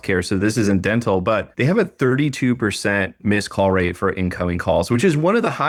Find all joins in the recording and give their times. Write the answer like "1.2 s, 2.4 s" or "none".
none